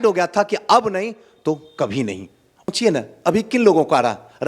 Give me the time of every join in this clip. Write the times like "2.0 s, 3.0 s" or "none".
2.6 s